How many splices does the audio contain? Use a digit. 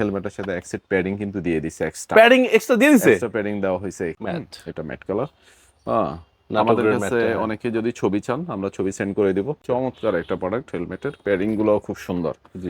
2